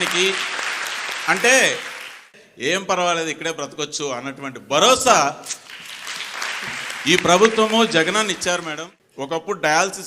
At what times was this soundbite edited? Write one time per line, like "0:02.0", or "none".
0:06.7